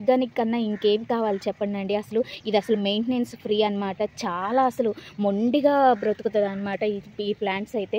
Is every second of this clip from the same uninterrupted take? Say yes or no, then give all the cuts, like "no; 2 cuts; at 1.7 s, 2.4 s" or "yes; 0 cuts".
yes; 0 cuts